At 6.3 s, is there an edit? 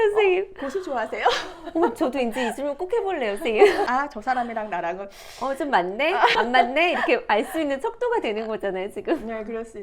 yes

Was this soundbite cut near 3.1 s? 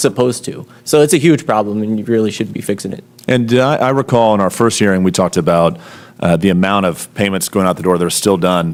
no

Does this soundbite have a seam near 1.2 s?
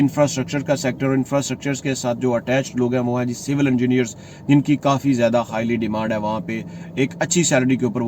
no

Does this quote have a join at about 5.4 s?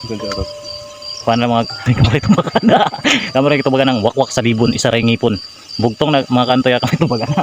no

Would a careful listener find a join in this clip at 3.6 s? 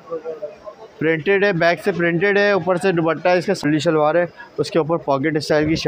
yes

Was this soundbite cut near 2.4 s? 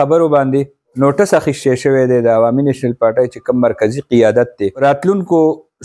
no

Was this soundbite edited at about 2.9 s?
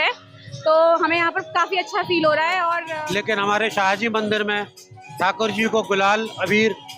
yes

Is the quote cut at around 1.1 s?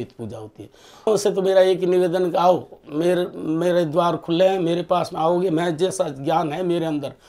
yes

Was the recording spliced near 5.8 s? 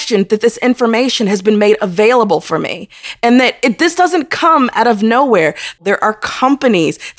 yes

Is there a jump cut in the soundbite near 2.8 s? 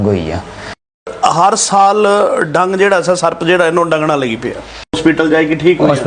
no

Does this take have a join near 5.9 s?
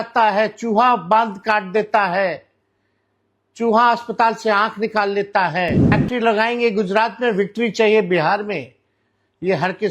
yes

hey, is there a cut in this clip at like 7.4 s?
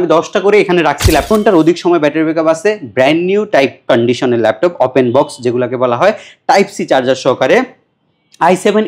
no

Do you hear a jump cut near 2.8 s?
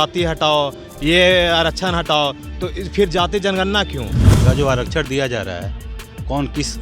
no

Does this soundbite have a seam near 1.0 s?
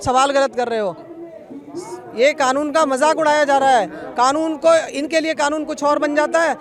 no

